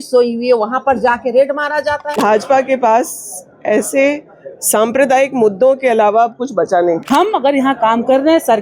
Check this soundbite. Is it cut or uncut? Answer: cut